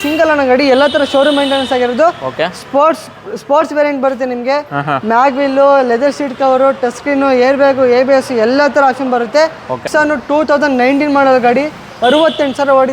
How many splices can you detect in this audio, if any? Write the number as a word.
one